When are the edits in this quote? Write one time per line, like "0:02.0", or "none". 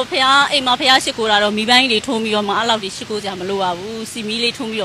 none